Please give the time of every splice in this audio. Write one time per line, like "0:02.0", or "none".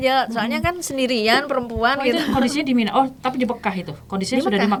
none